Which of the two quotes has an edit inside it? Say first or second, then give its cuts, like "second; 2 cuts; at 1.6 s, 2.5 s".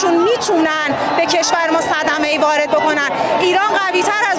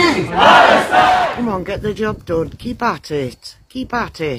second; 1 cut; at 1.3 s